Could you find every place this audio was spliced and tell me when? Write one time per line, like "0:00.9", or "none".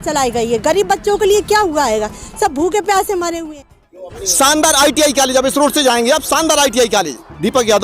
0:03.4